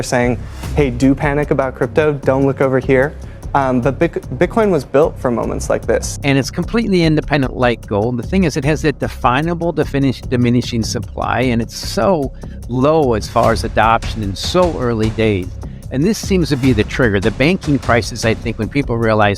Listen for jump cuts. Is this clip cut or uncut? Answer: cut